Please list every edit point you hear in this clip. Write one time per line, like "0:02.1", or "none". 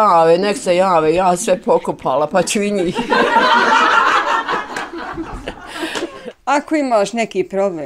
0:06.1